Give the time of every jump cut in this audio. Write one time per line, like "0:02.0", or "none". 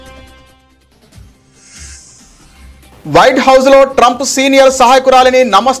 none